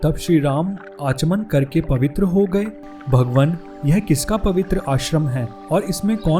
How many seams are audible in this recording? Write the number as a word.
one